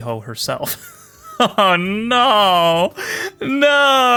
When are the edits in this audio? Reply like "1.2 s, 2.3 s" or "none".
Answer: none